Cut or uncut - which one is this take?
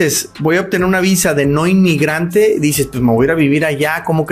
uncut